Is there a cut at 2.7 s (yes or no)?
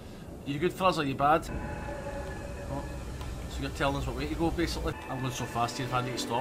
no